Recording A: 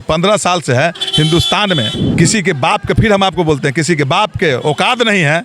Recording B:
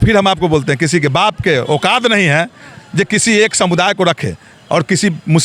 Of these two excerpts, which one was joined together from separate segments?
A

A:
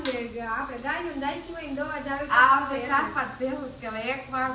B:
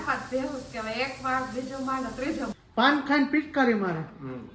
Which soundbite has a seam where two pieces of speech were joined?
B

